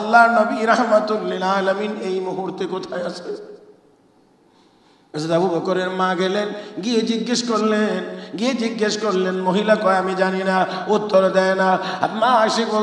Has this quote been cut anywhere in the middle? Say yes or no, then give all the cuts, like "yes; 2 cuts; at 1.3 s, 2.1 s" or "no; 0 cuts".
no; 0 cuts